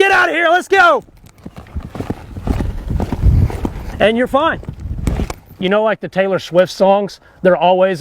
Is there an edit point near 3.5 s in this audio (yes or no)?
no